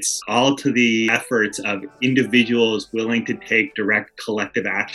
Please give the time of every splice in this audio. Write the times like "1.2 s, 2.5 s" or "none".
none